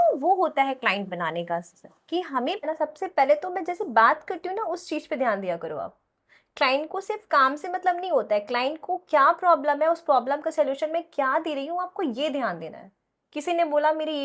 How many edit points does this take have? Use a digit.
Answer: 1